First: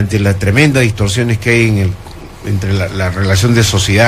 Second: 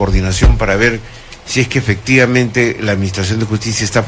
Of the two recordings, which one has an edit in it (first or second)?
first